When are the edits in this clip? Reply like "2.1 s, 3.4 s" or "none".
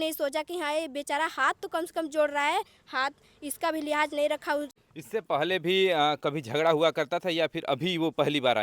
4.8 s

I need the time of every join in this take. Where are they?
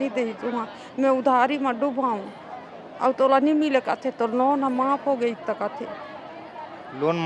none

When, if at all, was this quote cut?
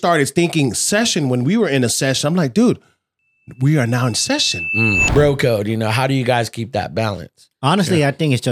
5.0 s

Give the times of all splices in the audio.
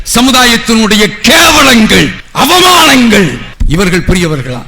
2.2 s

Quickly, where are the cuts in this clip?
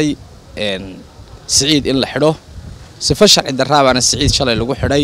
none

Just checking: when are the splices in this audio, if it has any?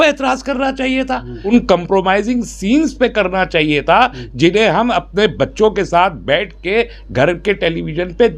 1.3 s

